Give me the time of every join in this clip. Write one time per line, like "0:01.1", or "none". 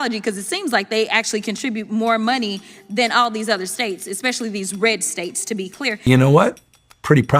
0:06.1

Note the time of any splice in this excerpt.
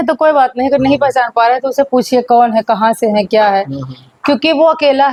none

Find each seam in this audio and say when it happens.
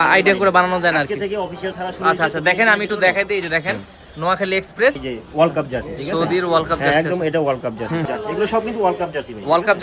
0:05.0
0:08.0

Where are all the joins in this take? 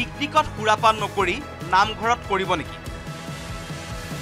none

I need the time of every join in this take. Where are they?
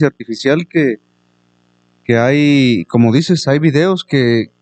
none

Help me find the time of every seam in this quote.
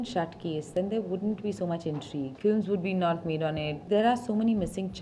0:02.3
0:03.8

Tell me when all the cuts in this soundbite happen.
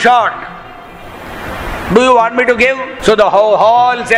0:02.9

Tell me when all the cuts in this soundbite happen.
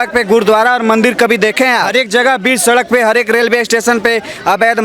0:01.9

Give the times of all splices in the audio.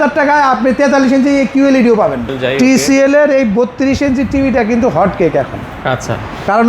0:02.3

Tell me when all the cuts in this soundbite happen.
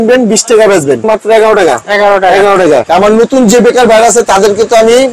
0:01.0
0:02.9

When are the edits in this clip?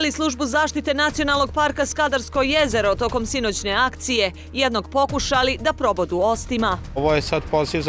0:06.9

